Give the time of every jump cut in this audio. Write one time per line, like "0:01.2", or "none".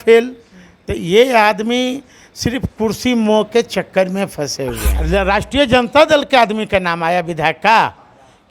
0:04.9